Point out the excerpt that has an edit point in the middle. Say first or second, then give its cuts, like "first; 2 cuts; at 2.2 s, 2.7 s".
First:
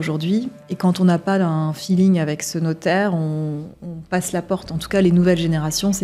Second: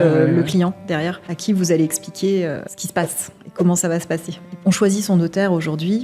second; 3 cuts; at 1.2 s, 2.7 s, 4.6 s